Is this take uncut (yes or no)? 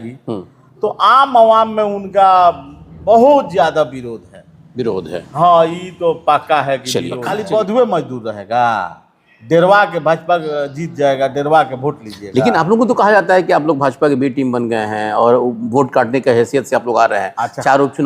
no